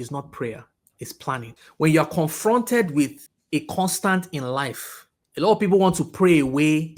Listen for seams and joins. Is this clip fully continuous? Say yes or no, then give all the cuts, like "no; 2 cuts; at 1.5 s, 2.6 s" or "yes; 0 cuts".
yes; 0 cuts